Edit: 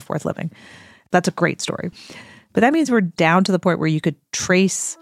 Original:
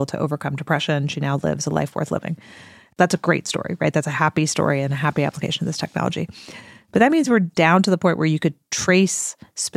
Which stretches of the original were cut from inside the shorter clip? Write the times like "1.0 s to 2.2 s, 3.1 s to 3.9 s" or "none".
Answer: 3.8 s to 6.3 s